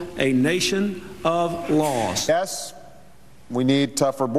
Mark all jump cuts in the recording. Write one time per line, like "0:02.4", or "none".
0:02.3